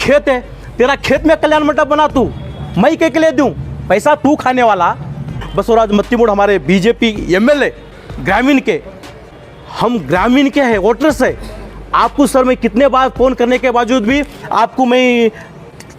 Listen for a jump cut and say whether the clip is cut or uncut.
cut